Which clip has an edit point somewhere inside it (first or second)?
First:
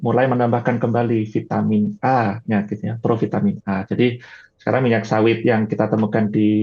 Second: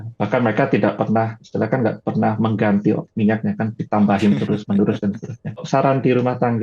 second